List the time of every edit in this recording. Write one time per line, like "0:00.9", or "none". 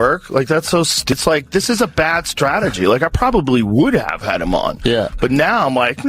0:01.1